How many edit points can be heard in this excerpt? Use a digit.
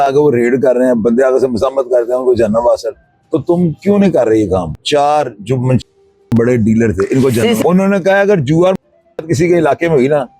2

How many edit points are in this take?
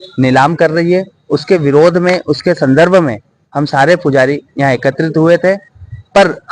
0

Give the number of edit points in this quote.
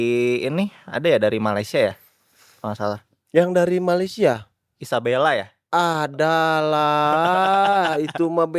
0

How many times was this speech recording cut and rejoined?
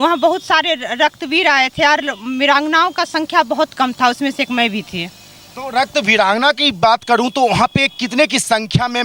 0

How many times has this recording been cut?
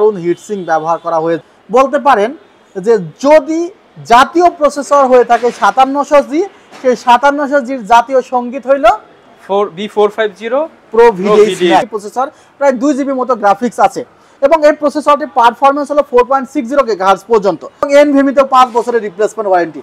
3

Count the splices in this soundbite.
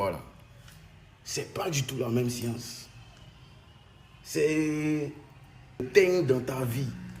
1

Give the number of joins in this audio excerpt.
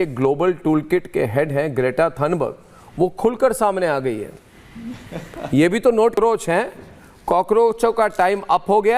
1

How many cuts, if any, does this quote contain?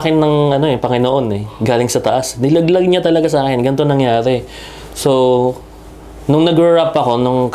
0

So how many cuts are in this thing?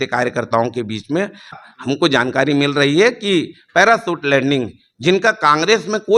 1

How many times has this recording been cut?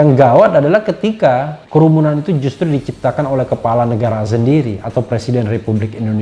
1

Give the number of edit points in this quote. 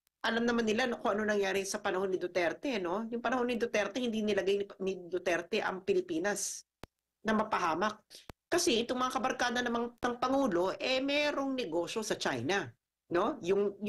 1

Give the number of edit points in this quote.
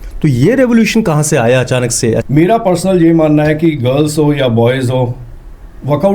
1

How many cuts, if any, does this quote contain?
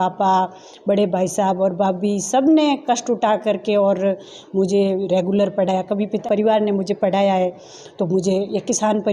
1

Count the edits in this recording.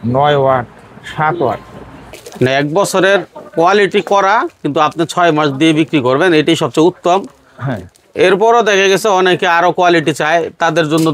1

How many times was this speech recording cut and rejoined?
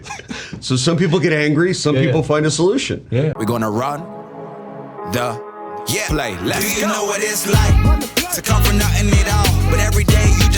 1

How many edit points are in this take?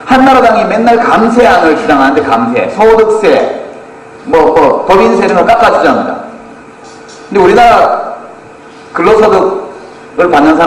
0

